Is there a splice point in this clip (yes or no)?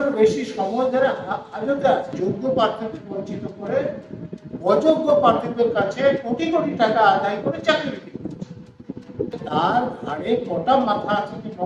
yes